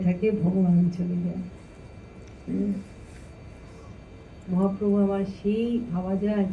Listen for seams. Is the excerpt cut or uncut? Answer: uncut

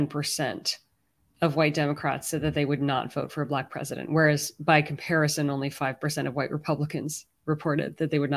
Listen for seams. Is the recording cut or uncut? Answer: uncut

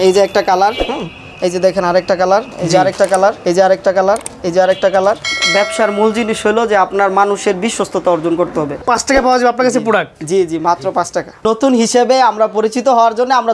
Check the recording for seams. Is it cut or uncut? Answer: cut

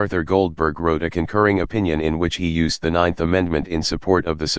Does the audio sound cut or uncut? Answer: uncut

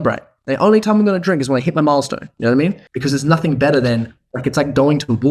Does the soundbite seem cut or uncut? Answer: cut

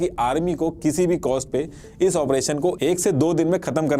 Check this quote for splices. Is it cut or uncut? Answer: uncut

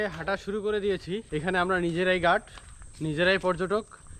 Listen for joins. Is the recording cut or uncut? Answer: cut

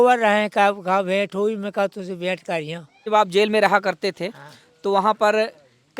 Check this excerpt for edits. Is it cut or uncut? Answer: cut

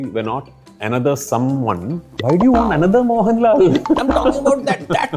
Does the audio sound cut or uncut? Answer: cut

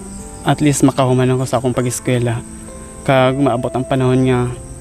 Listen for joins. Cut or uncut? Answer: uncut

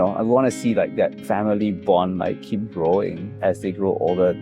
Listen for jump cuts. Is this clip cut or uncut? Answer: cut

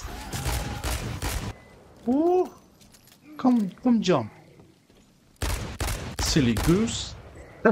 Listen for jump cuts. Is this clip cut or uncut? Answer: cut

